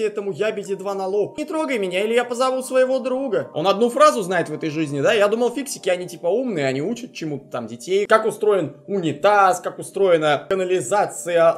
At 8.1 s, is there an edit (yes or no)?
yes